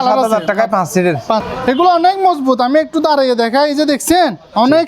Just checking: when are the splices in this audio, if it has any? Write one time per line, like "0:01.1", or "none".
0:01.5